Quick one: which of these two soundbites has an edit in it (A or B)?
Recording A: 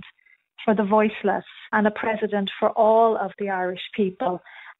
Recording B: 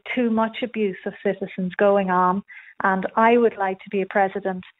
A